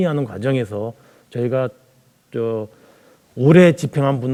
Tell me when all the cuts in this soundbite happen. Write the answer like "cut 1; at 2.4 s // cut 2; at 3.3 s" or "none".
none